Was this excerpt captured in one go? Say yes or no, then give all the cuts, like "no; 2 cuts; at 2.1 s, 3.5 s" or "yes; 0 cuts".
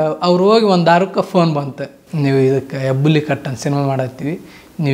yes; 0 cuts